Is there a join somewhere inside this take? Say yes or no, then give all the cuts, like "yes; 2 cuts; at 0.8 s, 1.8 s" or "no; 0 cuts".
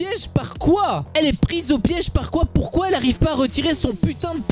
no; 0 cuts